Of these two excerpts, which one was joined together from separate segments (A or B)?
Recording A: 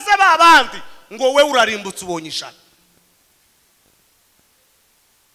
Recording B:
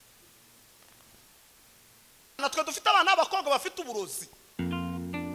B